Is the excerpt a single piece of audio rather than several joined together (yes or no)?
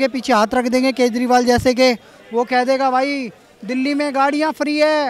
yes